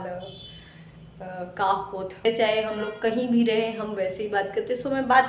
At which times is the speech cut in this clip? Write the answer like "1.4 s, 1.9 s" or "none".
2.2 s

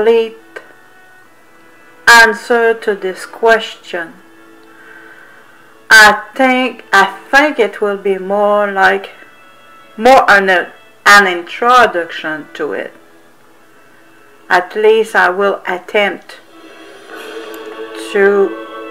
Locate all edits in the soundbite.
2.4 s

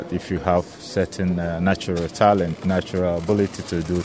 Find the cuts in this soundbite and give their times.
none

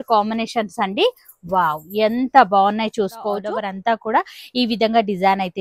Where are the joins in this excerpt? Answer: 3.4 s

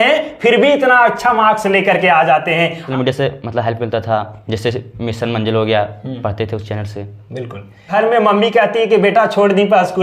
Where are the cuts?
2.9 s, 7.9 s

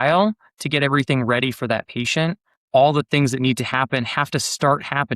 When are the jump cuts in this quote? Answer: 2.6 s

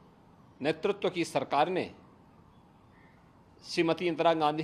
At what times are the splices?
none

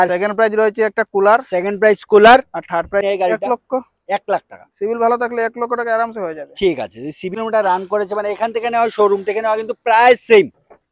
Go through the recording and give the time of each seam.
3.0 s, 7.4 s

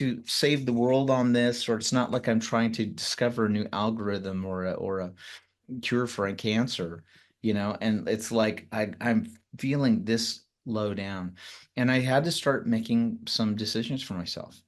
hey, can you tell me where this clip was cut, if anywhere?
none

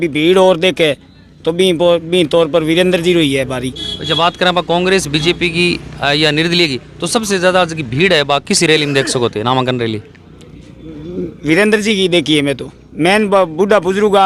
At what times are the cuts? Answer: none

